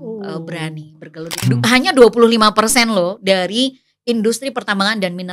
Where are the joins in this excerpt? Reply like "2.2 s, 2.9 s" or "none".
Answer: 1.5 s